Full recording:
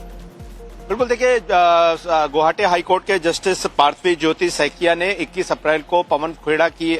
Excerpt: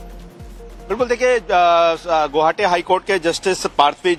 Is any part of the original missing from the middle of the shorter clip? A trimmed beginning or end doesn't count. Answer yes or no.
no